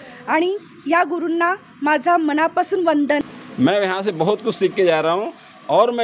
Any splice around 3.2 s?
yes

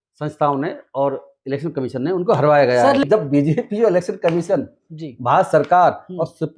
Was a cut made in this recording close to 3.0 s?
yes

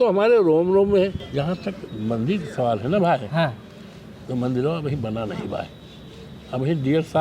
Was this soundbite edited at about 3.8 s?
no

